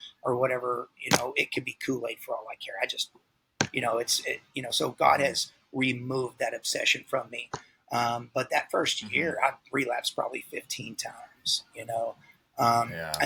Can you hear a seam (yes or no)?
no